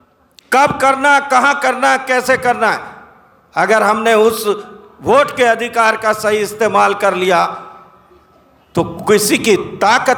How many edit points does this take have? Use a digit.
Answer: 0